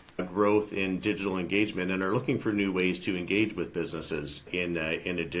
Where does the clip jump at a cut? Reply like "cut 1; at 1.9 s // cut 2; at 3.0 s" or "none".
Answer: cut 1; at 4.4 s